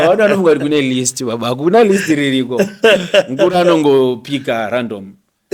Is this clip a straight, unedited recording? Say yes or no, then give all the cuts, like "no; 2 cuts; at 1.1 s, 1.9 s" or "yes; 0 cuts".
yes; 0 cuts